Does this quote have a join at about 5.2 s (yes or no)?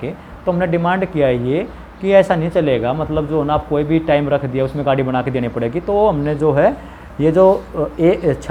no